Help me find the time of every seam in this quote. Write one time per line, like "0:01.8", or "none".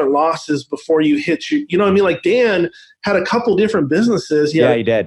none